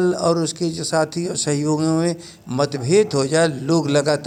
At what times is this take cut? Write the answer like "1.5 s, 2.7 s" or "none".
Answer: none